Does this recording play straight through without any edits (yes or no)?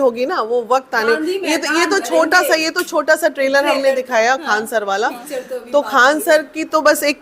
yes